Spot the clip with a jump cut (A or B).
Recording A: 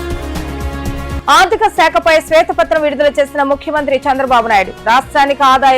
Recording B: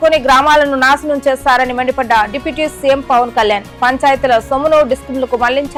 A